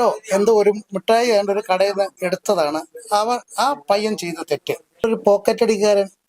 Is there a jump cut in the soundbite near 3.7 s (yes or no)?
no